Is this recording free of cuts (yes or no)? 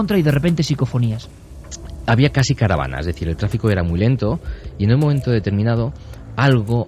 no